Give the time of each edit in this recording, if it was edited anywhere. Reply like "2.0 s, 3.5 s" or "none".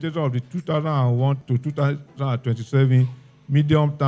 1.4 s